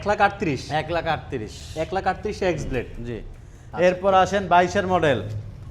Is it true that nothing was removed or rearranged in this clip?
yes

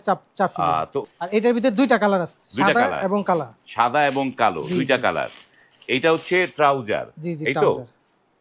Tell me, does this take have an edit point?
yes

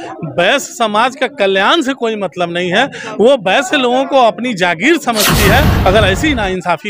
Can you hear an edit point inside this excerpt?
yes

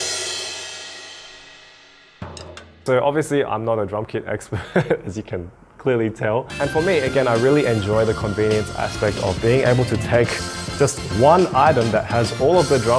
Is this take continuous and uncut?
no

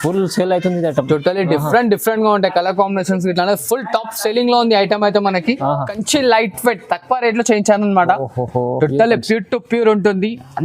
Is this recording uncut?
no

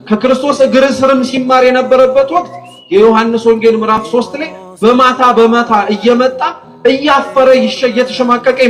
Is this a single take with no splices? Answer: yes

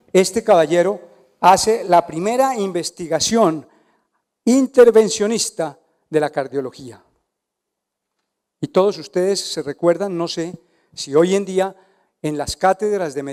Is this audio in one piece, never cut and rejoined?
yes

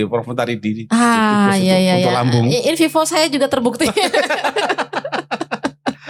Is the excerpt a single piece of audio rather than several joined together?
yes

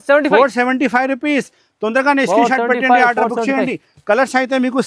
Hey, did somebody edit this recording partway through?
no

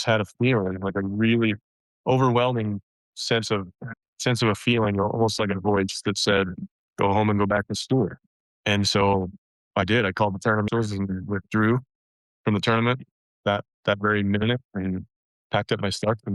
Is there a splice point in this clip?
yes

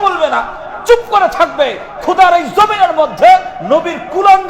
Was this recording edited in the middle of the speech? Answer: no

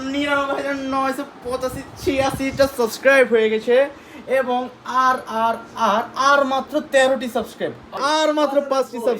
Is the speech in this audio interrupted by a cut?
yes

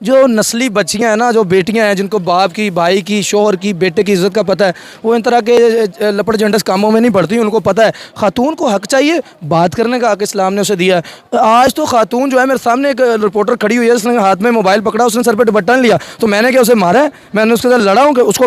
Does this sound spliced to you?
no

